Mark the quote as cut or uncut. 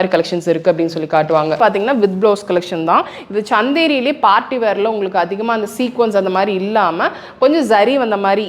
cut